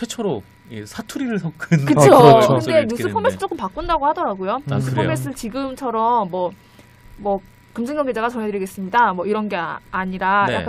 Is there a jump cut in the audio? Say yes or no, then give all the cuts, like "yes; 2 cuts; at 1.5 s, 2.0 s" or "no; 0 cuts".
no; 0 cuts